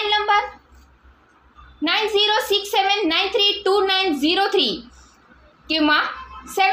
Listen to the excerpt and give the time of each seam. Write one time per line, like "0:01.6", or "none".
none